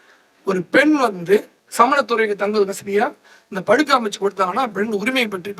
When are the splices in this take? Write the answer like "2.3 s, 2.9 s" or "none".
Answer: 1.6 s